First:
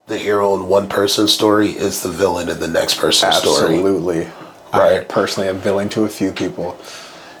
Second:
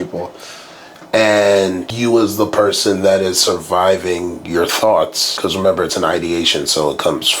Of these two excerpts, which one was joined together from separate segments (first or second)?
second